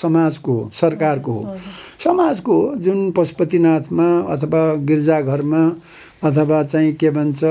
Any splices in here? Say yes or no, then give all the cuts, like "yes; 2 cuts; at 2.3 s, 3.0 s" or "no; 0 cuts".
no; 0 cuts